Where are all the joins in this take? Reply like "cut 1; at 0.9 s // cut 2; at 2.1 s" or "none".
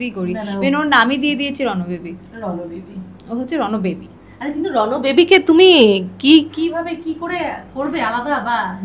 none